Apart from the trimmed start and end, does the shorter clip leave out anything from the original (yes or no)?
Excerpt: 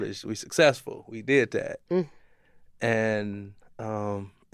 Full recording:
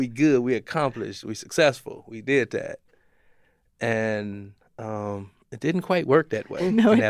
no